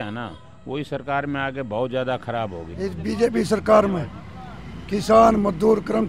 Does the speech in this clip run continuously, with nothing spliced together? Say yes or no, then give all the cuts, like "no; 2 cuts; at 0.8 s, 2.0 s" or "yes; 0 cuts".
no; 1 cut; at 2.6 s